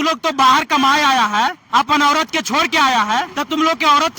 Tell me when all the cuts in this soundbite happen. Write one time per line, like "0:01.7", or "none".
0:01.6
0:03.4